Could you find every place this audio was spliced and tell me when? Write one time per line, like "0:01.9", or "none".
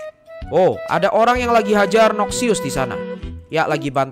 none